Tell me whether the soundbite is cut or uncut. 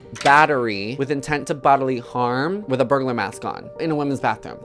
cut